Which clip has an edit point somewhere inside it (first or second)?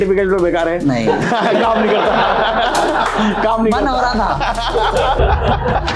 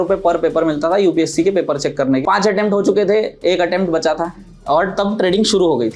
second